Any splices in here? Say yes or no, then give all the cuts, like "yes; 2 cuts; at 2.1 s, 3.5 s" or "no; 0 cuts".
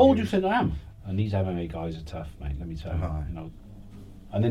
yes; 2 cuts; at 0.9 s, 3.5 s